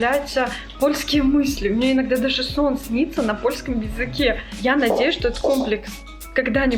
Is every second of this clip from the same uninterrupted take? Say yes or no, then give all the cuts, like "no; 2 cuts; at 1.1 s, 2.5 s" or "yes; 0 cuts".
no; 1 cut; at 4.5 s